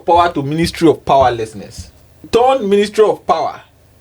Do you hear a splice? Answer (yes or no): yes